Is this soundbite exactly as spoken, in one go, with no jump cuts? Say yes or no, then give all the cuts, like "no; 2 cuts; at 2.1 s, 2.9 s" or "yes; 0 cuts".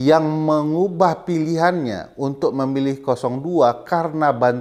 yes; 0 cuts